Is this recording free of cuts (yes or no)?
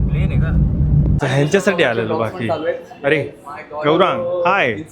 no